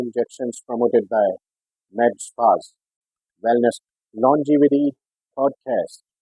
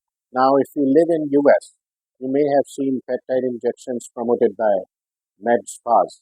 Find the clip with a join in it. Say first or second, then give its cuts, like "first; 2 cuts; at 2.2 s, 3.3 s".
first; 1 cut; at 3.8 s